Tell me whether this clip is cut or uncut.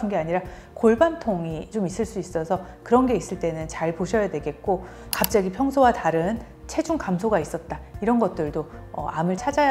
cut